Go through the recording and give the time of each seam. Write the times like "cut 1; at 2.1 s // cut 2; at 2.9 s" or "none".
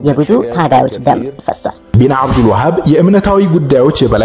cut 1; at 1.8 s